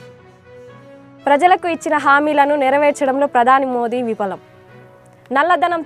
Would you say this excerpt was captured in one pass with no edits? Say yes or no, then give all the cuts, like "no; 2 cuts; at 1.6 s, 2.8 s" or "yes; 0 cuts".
no; 1 cut; at 1.1 s